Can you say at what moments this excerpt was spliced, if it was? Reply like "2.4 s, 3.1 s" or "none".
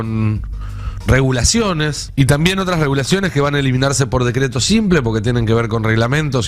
2.0 s

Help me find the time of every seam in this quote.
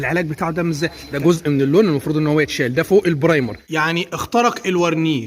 1.0 s, 3.6 s

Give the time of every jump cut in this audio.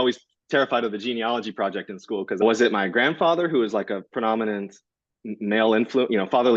2.4 s

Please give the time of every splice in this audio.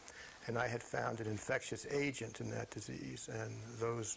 none

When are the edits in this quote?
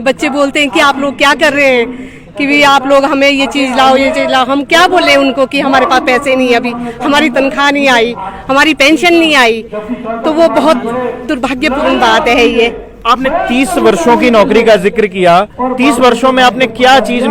none

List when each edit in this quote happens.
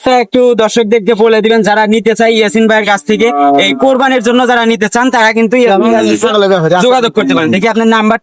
none

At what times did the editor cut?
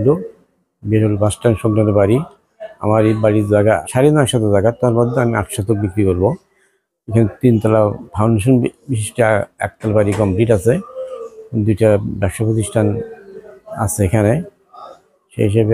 3.8 s

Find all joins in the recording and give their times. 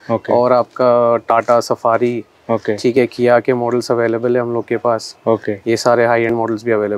none

